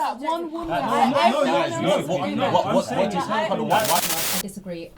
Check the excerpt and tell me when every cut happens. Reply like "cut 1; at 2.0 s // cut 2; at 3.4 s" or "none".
cut 1; at 4.0 s